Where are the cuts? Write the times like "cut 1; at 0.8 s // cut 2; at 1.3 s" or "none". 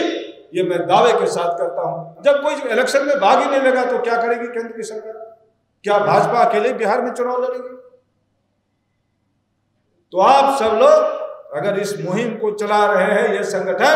none

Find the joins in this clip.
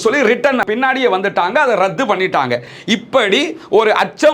cut 1; at 2.7 s

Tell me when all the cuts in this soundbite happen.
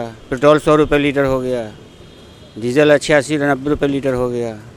none

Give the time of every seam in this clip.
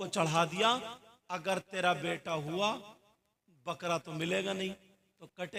none

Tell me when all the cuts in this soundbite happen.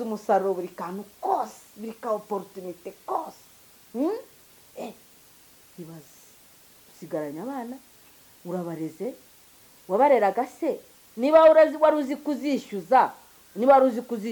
none

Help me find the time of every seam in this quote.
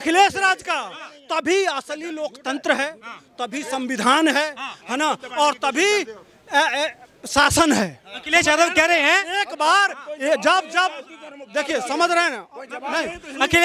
none

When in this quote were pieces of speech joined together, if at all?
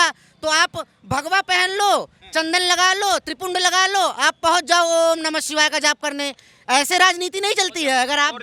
none

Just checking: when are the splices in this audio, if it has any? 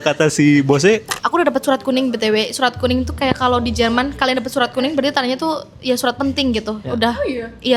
cut 1; at 1.1 s

